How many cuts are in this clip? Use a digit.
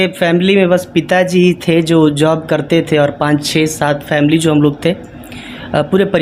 0